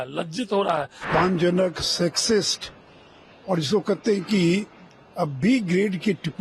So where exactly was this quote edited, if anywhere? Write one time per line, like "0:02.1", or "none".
0:01.0